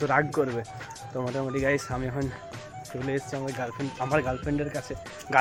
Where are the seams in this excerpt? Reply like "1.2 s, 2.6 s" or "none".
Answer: none